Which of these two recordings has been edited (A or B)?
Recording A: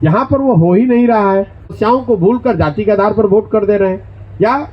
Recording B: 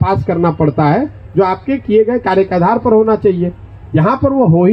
A